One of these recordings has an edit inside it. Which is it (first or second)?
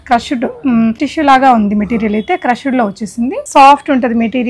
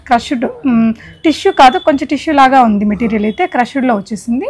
first